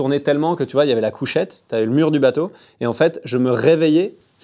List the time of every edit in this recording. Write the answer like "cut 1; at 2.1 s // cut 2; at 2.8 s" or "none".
none